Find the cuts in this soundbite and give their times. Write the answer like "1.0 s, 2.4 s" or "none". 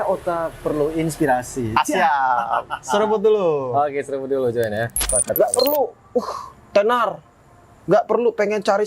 5.0 s